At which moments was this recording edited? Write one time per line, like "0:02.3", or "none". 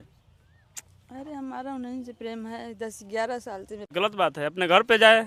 0:03.9